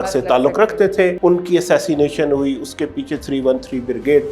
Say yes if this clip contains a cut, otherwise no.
yes